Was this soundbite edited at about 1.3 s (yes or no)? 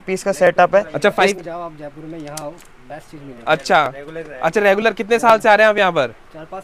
yes